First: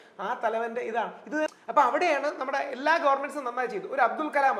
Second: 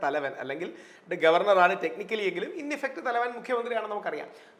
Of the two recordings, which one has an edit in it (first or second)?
first